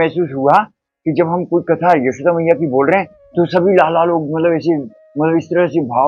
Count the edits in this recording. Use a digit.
0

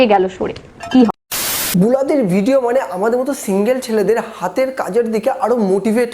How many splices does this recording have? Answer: 1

